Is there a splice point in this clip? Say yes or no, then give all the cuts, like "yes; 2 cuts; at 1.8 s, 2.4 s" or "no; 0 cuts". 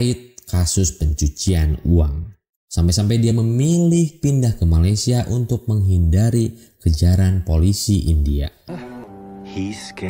yes; 1 cut; at 8.7 s